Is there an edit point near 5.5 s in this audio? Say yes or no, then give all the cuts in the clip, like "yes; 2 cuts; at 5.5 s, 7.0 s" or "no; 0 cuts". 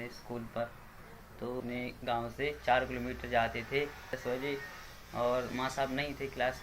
no; 2 cuts; at 1.6 s, 4.2 s